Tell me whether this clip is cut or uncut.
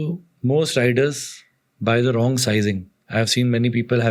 uncut